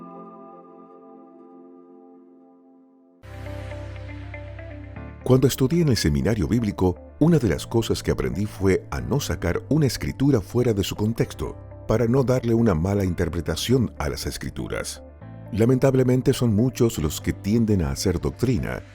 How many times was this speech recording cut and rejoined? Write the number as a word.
one